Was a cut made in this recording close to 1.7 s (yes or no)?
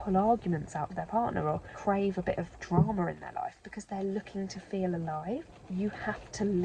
yes